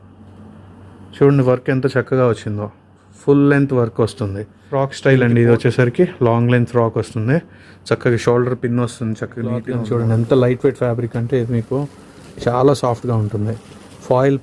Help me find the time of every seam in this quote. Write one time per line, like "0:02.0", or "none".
0:04.7
0:09.7